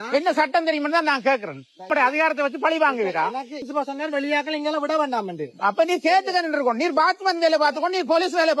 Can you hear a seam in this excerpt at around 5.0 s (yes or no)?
no